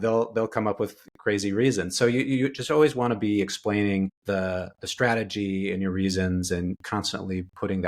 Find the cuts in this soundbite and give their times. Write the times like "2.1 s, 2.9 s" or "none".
6.8 s

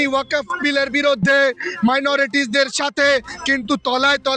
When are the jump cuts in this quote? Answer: none

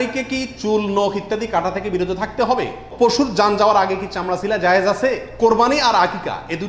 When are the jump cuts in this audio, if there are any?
2.8 s, 5.3 s

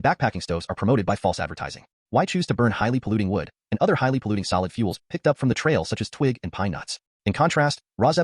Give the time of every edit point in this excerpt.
7.0 s

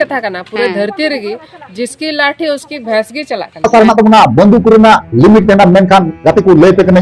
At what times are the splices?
3.7 s

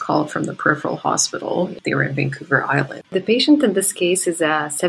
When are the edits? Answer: 1.8 s, 3.1 s

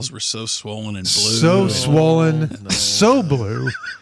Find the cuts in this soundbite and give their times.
none

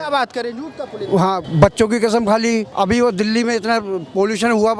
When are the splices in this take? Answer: 1.5 s, 2.7 s

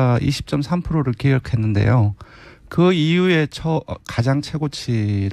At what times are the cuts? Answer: none

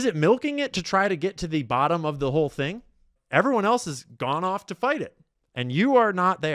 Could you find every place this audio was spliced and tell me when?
3.1 s

